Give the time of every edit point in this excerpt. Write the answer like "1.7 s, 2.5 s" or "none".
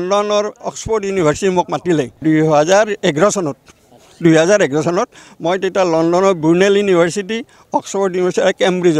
2.2 s